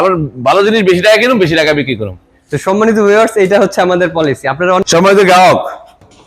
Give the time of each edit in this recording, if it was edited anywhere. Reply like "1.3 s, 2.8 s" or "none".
4.8 s